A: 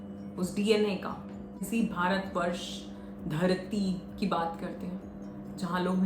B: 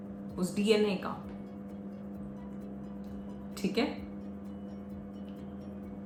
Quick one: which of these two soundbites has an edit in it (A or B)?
A